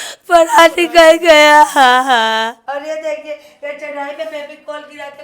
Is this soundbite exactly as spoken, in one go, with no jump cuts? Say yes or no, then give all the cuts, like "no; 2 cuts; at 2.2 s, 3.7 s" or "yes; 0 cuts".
no; 1 cut; at 2.6 s